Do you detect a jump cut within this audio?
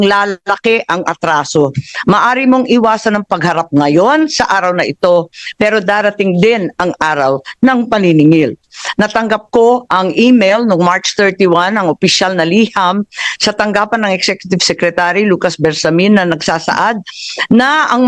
no; 0 cuts

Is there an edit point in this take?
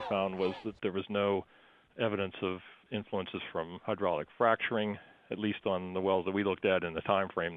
no; 0 cuts

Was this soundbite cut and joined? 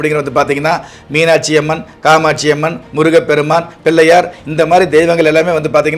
no; 0 cuts

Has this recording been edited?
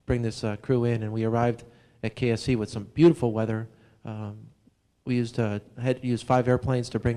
no; 0 cuts

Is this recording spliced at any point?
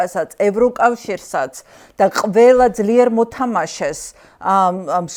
no; 0 cuts

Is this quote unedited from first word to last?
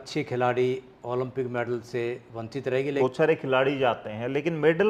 no; 1 cut; at 3.0 s

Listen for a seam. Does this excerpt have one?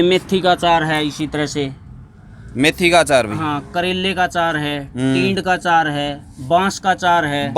no; 0 cuts

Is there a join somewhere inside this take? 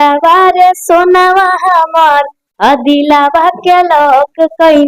no; 0 cuts

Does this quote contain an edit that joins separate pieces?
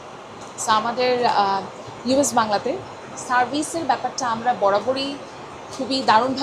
no; 0 cuts

